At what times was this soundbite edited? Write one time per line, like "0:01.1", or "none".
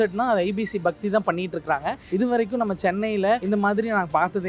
0:02.0
0:03.4